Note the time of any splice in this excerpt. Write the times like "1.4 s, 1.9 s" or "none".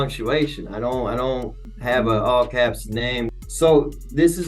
1.7 s, 3.3 s